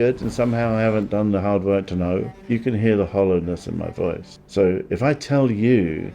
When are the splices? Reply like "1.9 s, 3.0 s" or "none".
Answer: 2.4 s